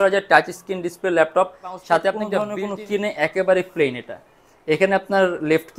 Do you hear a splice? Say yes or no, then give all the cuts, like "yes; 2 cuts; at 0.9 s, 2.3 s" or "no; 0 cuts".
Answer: yes; 1 cut; at 2.5 s